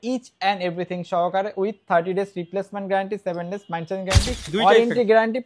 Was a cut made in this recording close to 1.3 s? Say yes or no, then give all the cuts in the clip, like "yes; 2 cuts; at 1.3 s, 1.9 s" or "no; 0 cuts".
no; 1 cut; at 4.5 s